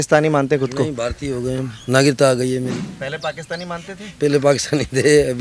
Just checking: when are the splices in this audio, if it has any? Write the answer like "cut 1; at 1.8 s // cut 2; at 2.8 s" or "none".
cut 1; at 2.9 s